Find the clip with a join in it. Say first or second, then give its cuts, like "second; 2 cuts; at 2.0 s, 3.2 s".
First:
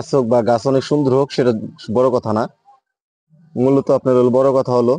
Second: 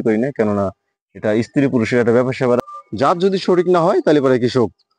second; 1 cut; at 2.6 s